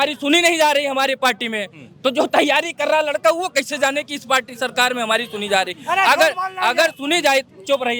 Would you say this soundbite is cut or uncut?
uncut